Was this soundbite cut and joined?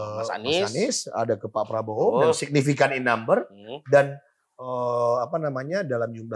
no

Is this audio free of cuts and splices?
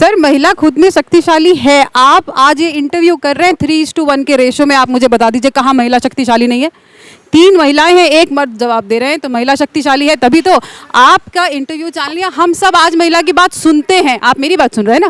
yes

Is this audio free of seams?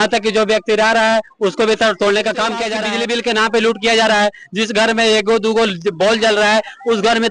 no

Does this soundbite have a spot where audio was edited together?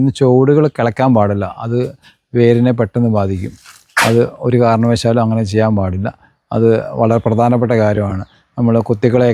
no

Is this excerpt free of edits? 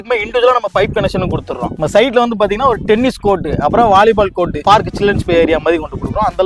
yes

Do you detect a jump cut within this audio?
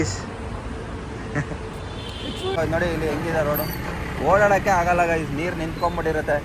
yes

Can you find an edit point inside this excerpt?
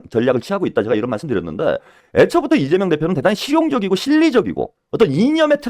yes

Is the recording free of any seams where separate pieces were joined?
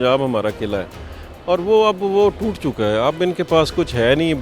yes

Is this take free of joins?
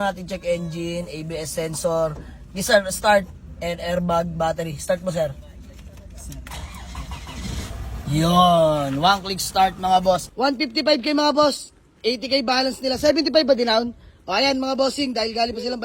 no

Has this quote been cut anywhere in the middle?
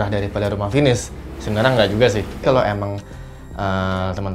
yes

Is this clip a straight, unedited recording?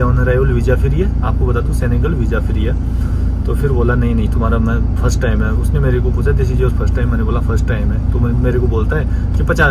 yes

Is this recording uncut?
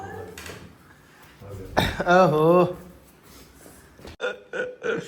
yes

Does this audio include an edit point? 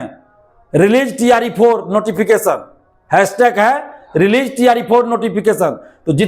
no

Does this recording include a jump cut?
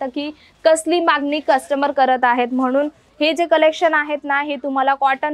no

